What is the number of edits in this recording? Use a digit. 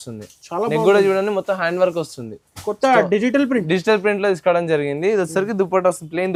0